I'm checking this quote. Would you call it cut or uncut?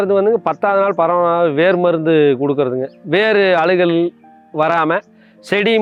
uncut